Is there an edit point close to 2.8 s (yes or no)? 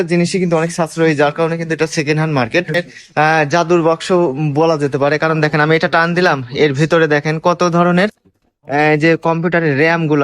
yes